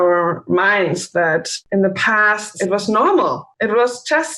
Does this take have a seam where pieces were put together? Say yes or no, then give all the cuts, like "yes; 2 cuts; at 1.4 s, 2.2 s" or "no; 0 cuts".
yes; 3 cuts; at 1.6 s, 2.6 s, 3.5 s